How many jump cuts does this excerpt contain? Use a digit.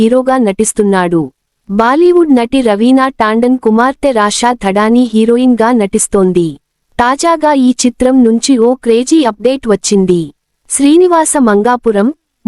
1